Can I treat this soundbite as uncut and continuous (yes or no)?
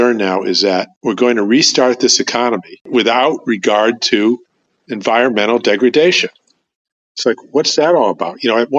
yes